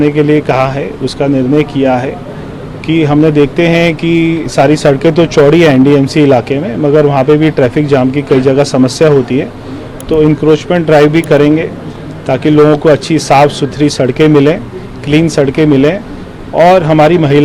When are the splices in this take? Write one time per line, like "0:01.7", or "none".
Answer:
none

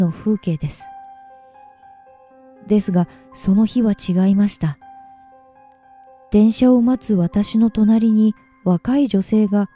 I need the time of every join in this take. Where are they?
0:07.0

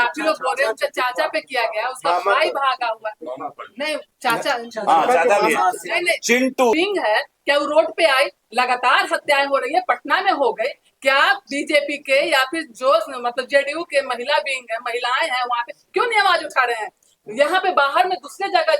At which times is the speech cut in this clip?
0:06.7

